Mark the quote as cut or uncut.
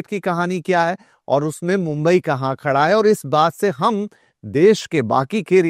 uncut